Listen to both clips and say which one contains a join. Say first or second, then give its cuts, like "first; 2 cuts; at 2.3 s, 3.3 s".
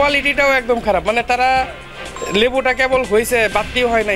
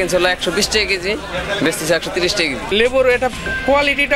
second; 1 cut; at 2.7 s